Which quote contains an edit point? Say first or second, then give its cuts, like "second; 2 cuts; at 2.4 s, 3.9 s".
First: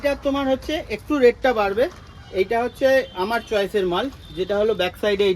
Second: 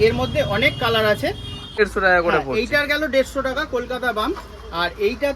second; 1 cut; at 1.8 s